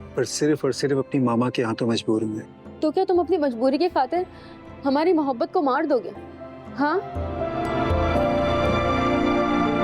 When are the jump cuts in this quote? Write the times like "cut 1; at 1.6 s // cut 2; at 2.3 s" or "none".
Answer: none